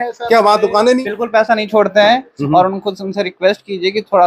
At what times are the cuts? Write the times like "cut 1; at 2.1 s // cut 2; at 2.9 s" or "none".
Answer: cut 1; at 1.0 s